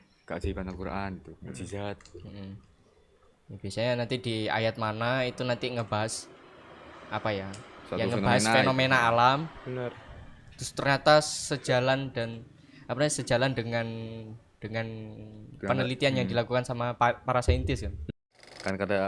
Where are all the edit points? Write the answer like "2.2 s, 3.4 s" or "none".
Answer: 17.9 s